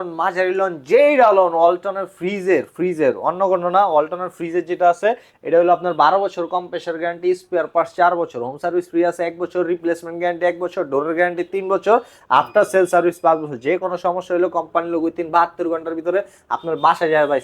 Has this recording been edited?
no; 0 cuts

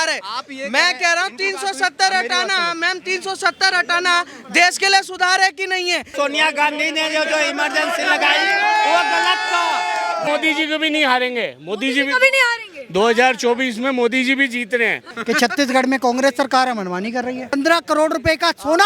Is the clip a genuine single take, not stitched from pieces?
no; 4 cuts; at 6.1 s, 10.2 s, 15.1 s, 17.5 s

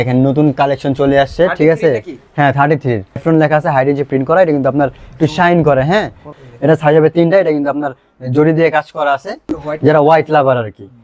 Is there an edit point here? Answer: yes; 3 cuts; at 3.2 s, 6.3 s, 9.5 s

